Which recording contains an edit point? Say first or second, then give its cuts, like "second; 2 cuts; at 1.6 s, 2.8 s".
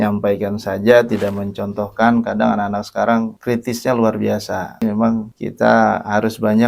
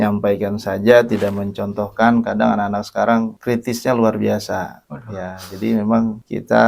first; 1 cut; at 4.8 s